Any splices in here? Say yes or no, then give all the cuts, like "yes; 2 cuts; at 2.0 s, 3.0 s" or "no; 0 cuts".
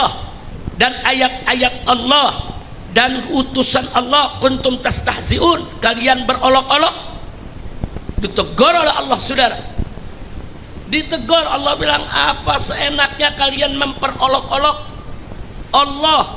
no; 0 cuts